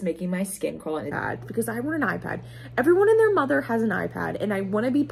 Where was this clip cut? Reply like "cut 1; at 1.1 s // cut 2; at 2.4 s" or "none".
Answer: cut 1; at 1.1 s